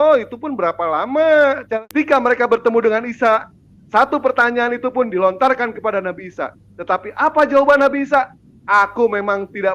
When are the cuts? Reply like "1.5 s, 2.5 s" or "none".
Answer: 1.7 s